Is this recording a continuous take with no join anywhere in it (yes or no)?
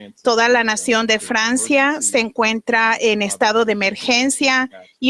no